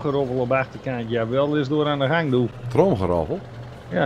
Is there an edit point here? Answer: yes; 1 cut; at 2.6 s

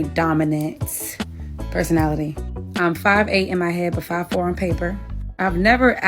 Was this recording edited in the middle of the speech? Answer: yes; 1 cut; at 2.3 s

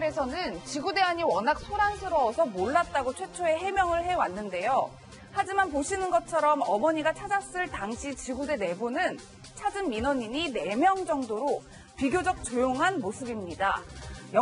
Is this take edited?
yes; 1 cut; at 7.9 s

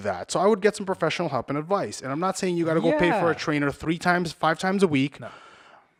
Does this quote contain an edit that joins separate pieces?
no; 0 cuts

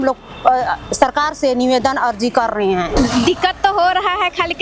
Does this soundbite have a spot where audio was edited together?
yes; 1 cut; at 2.9 s

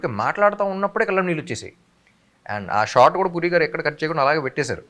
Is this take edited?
no; 0 cuts

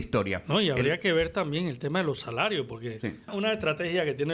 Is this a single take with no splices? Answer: no; 1 cut; at 3.3 s

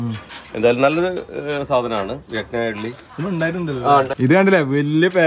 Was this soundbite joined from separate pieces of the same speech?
yes; 1 cut; at 4.1 s

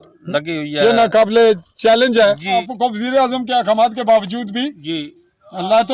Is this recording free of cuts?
no; 1 cut; at 2.6 s

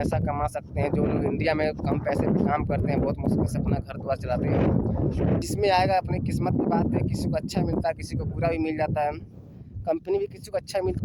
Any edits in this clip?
yes; 1 cut; at 5.4 s

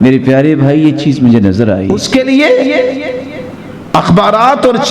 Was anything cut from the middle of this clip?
yes; 1 cut; at 2.0 s

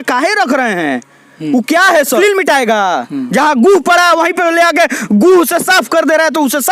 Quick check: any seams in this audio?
yes; 1 cut; at 2.2 s

